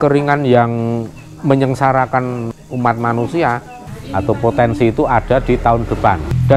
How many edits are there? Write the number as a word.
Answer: one